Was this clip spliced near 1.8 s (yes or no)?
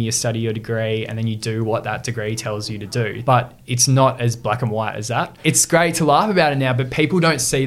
no